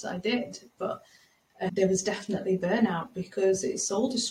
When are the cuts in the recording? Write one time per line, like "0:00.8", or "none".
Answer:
0:01.7

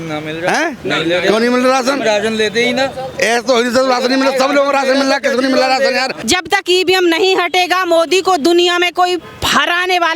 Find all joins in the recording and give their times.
0:06.1

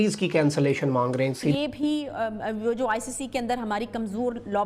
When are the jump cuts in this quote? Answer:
0:01.4

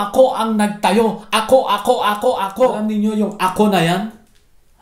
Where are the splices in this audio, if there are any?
0:02.8

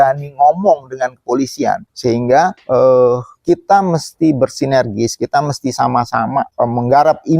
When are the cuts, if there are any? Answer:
0:01.9
0:02.6
0:06.5

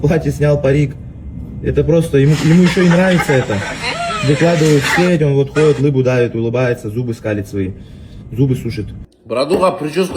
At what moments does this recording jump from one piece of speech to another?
0:09.0

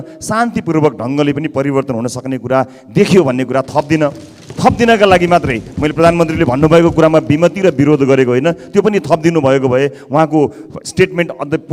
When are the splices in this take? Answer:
none

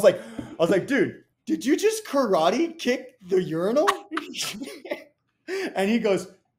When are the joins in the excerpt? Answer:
0:01.3

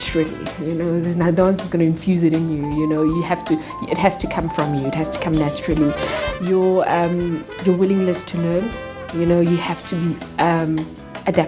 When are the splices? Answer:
none

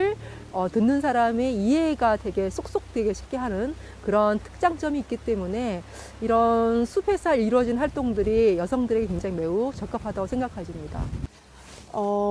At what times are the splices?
0:11.2

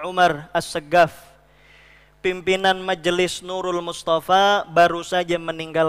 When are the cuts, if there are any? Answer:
none

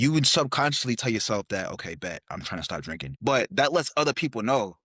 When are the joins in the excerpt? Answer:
0:03.1

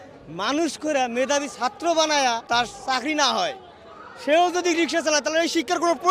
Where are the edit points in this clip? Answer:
0:02.4

